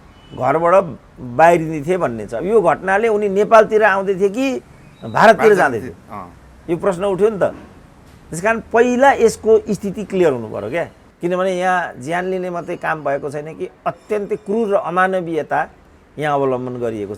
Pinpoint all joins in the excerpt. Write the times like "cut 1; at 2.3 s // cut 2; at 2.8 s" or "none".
cut 1; at 11.0 s